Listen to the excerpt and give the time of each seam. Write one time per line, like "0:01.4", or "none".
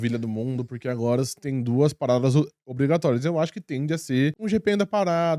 0:04.4